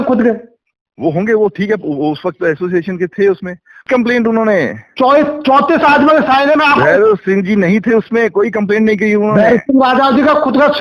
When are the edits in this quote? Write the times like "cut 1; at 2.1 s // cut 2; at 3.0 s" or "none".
cut 1; at 3.9 s